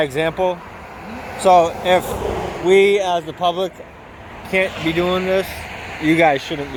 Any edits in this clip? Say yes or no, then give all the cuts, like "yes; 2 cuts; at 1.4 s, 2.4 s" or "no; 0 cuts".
no; 0 cuts